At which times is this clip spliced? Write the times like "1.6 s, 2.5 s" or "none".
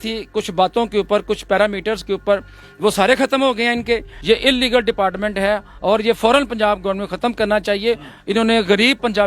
4.1 s